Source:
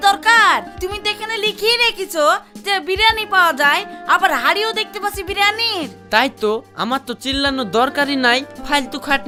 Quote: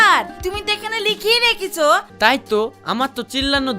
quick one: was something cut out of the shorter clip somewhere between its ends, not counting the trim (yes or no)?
yes